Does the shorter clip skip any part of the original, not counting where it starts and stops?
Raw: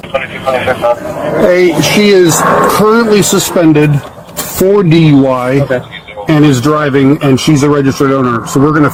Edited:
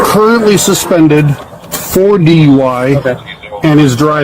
no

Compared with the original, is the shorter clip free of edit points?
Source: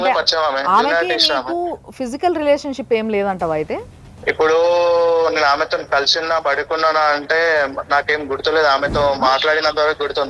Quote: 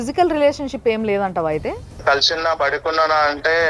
no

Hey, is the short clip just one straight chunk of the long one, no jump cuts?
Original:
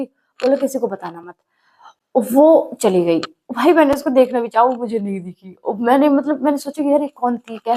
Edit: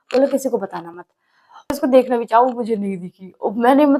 no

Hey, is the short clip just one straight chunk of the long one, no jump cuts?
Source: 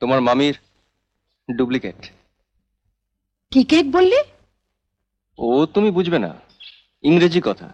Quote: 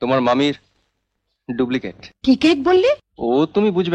no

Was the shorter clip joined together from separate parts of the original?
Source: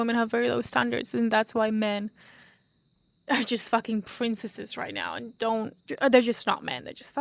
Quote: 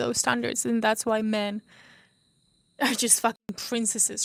no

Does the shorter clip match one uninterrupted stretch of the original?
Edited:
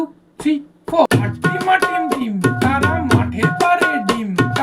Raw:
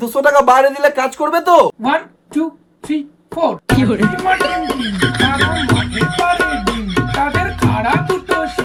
no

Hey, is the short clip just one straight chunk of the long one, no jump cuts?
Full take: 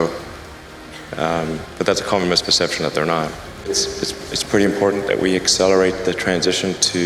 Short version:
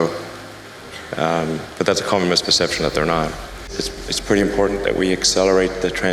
no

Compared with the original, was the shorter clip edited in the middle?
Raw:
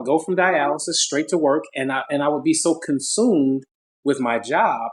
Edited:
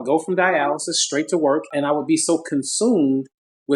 yes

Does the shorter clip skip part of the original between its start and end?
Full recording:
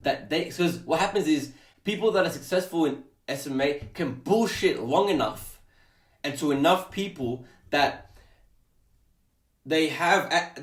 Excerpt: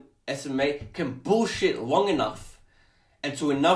no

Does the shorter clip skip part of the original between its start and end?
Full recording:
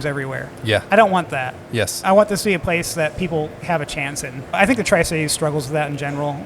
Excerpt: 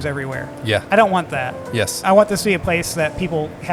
no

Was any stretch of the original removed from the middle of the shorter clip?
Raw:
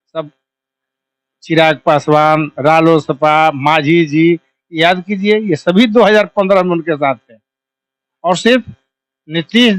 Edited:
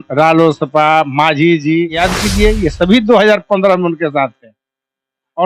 yes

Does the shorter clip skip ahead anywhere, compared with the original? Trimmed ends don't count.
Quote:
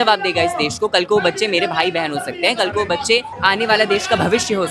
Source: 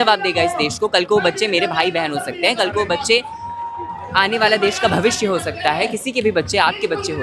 yes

